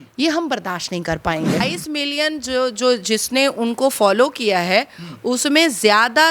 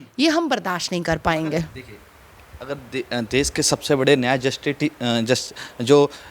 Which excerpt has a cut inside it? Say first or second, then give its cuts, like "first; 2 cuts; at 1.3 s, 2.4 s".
first; 1 cut; at 1.6 s